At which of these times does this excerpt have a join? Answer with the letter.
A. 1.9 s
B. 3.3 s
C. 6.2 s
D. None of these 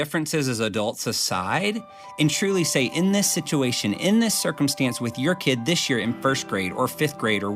D